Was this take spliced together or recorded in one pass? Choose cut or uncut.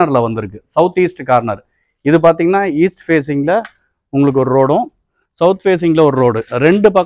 uncut